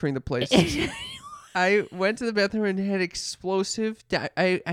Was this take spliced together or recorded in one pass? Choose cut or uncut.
cut